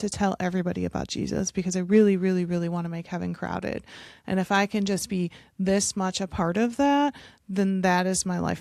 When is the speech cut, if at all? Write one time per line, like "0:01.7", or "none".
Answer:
none